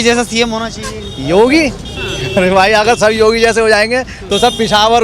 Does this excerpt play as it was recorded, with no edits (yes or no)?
yes